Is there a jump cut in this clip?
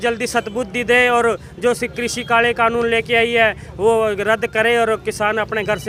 no; 0 cuts

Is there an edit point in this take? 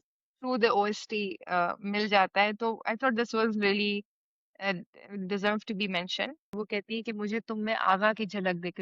yes; 1 cut; at 6.5 s

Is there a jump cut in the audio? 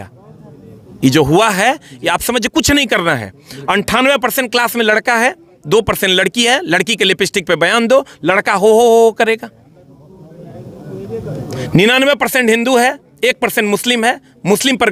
no; 0 cuts

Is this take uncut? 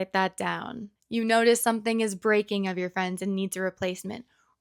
yes; 0 cuts

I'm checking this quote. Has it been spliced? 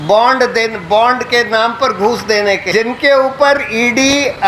yes; 1 cut; at 2.6 s

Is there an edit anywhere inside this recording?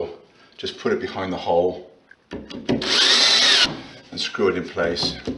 yes; 1 cut; at 3.7 s

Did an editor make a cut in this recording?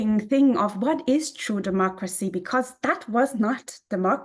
no; 0 cuts

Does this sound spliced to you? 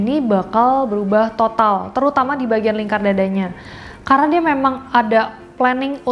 no; 0 cuts

